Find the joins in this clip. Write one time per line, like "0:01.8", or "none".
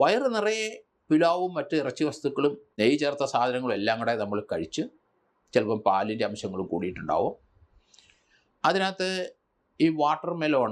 0:02.7